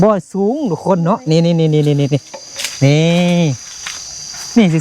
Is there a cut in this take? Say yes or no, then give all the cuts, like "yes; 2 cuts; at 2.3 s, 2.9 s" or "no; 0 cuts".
no; 0 cuts